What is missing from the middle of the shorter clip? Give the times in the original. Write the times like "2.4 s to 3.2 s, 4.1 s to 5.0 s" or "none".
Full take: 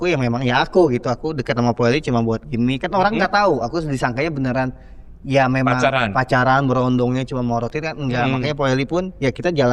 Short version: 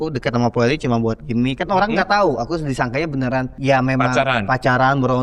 4.8 s to 5.2 s